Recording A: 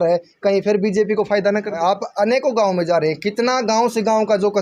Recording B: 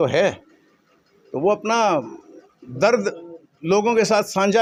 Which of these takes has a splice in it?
A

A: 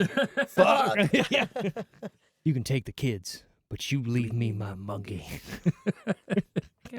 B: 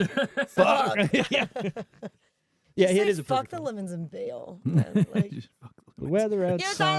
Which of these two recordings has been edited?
A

